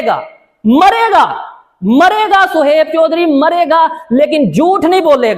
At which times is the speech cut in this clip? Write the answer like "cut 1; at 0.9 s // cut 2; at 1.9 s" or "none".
none